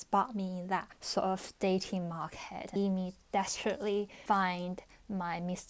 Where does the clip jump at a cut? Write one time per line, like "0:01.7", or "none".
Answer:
0:01.0
0:02.8